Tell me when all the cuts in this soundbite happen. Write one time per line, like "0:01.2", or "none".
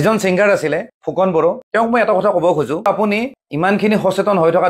0:01.6
0:02.9